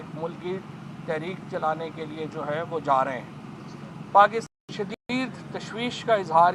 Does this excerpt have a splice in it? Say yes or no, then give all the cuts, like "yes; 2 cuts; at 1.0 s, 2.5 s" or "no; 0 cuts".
yes; 1 cut; at 4.4 s